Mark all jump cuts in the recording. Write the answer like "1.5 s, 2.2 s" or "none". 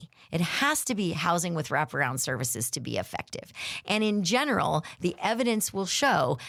none